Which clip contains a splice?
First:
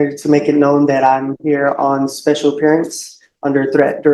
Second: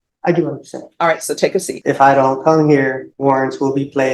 second; 2 cuts; at 1.7 s, 3.1 s

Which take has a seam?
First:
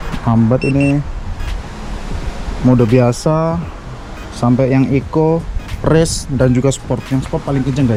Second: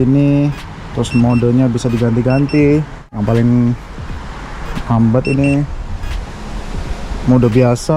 second; 1 cut; at 3.2 s

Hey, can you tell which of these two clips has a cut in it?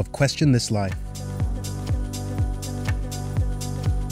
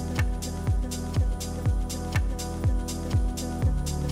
first; 1 cut; at 1.0 s

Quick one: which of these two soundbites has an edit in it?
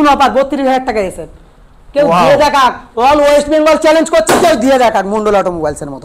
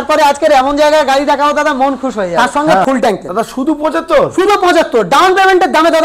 second; 1 cut; at 2.3 s

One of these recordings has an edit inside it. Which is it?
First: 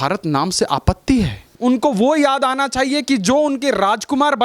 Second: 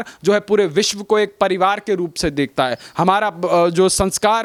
first; 1 cut; at 1.5 s

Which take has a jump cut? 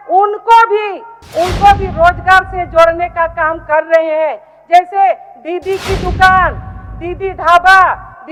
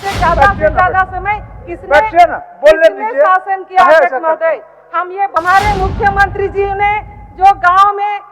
second; 1 cut; at 5.3 s

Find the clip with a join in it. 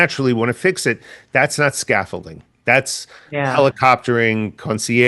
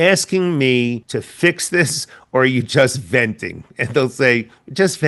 second; 1 cut; at 1.0 s

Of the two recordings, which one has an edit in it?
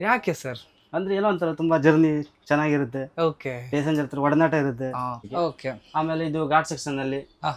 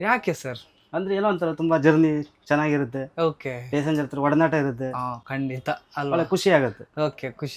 first; 1 cut; at 5.2 s

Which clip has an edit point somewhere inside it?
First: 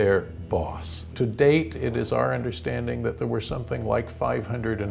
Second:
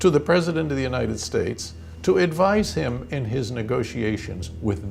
first; 1 cut; at 1.1 s

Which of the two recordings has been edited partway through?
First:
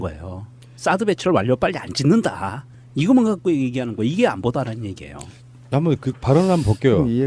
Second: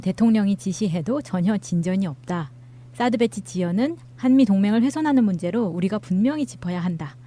first; 1 cut; at 1.9 s

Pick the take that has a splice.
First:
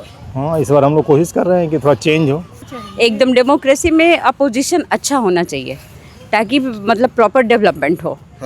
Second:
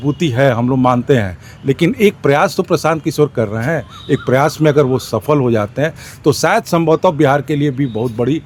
first; 1 cut; at 2.6 s

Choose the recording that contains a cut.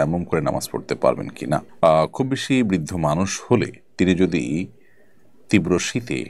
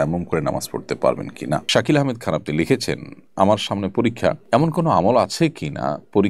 second; 2 cuts; at 1.7 s, 4.4 s

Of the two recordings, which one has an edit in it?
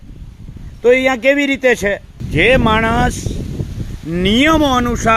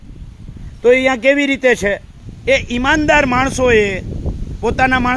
second; 1 cut; at 2.2 s

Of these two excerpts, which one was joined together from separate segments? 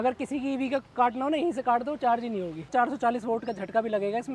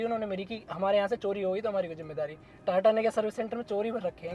first; 1 cut; at 2.7 s

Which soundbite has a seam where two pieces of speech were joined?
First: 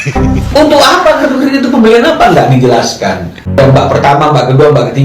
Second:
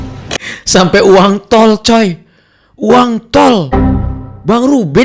first; 1 cut; at 3.6 s

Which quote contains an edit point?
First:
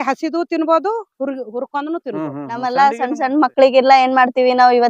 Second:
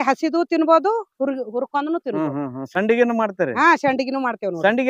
first; 1 cut; at 2.7 s

